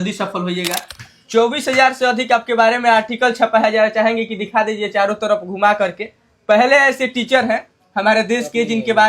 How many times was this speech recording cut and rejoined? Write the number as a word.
one